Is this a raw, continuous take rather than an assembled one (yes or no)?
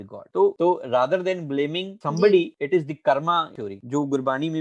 yes